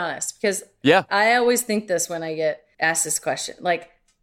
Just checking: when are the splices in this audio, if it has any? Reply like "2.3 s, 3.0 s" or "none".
2.7 s

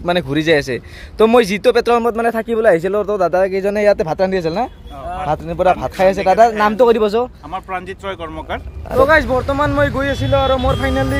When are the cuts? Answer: 8.9 s

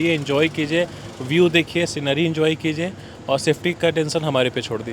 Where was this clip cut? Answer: none

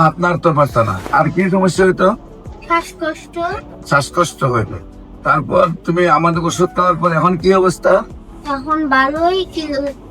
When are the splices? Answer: 1.0 s, 3.7 s

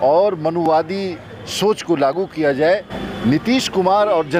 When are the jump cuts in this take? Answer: none

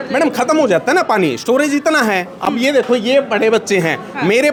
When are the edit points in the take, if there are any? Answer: none

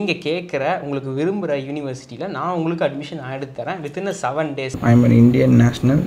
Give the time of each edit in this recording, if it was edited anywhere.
4.8 s

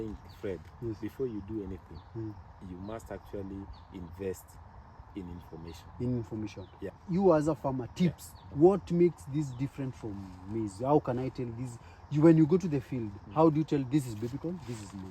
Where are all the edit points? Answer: 7.0 s

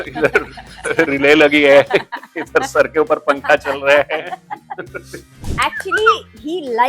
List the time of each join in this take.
5.5 s

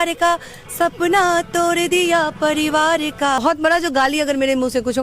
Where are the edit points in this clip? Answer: 3.4 s

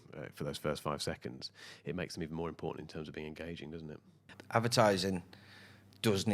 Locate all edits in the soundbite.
4.3 s

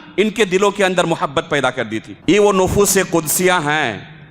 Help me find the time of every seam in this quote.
2.1 s

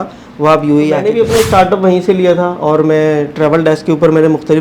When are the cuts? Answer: 1.1 s

